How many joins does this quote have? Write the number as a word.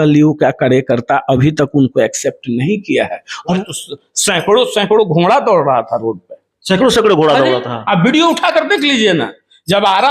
one